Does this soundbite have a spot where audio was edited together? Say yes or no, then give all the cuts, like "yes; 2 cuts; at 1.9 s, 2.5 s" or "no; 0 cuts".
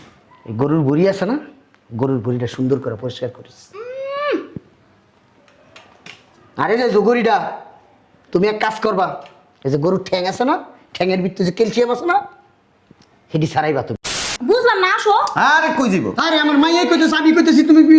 yes; 1 cut; at 14.0 s